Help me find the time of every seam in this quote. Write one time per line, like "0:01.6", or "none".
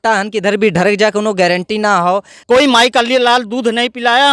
0:02.3

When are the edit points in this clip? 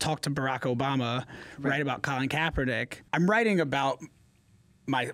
0:02.9

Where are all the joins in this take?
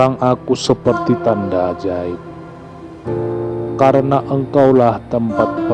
0:02.4
0:03.8

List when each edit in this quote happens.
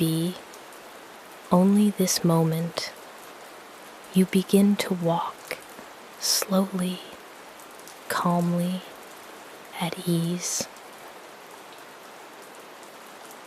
0:10.6

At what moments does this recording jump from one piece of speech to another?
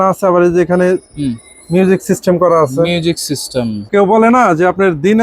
0:03.8

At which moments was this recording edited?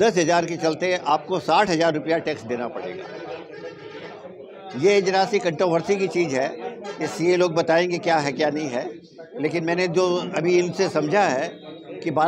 none

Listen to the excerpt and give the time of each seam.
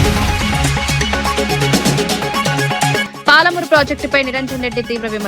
0:01.2
0:02.6

